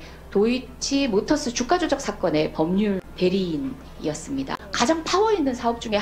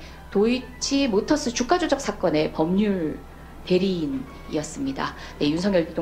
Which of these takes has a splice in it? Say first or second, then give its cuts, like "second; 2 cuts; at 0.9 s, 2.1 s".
first; 2 cuts; at 3.0 s, 4.6 s